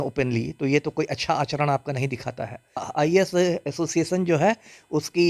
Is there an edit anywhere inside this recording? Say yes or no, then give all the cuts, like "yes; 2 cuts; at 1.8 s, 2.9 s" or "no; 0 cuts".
yes; 1 cut; at 2.8 s